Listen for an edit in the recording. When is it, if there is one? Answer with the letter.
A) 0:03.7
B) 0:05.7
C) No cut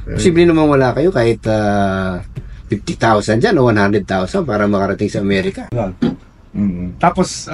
B